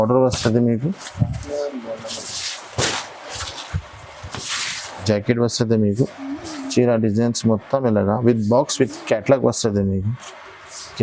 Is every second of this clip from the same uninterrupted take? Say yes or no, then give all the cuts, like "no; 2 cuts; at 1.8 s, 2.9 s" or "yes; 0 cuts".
no; 1 cut; at 5.0 s